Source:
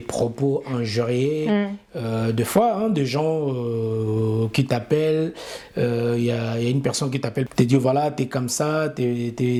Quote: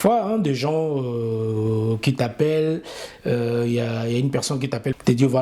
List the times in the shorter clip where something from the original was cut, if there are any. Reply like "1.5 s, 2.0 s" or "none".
none